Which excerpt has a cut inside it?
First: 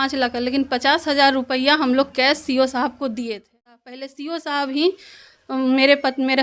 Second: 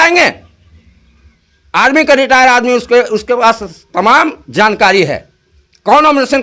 first; 1 cut; at 4.1 s

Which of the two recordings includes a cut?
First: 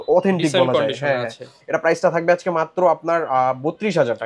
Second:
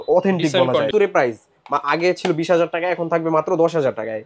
second; 1 cut; at 0.9 s

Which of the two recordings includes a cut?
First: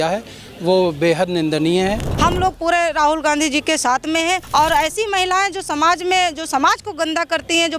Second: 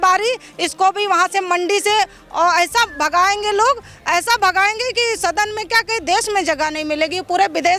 first; 2 cuts; at 2.1 s, 4.4 s

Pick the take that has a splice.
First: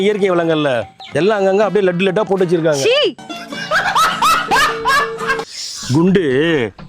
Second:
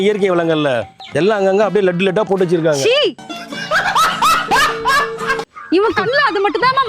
first; 1 cut; at 5.7 s

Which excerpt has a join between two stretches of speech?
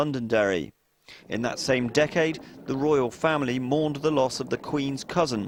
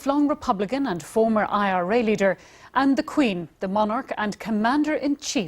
second; 1 cut; at 2.9 s

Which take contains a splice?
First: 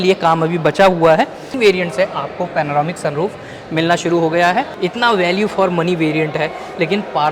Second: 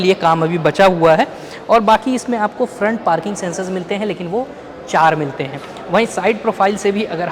first; 2 cuts; at 1.4 s, 4.7 s

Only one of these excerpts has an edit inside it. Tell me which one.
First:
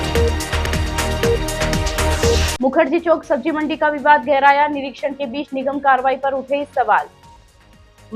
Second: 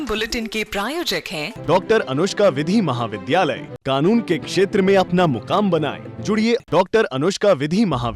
first; 1 cut; at 2.4 s

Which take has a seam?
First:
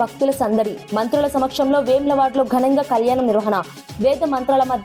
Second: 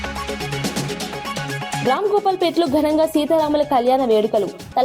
second; 1 cut; at 1.8 s

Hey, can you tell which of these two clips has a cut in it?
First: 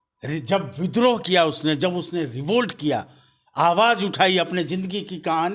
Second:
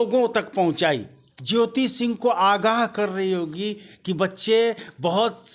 second; 1 cut; at 1.3 s

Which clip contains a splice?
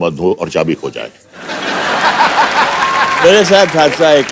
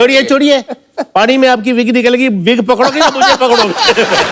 first; 1 cut; at 3.2 s

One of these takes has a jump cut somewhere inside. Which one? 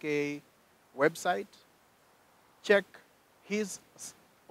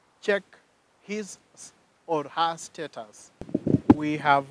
second; 1 cut; at 3.4 s

